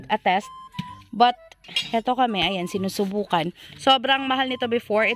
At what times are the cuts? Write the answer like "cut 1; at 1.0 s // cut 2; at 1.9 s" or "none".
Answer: cut 1; at 3.6 s